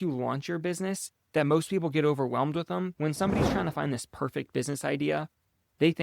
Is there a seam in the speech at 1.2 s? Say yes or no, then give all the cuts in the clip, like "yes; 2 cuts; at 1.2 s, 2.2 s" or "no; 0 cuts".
no; 1 cut; at 2.9 s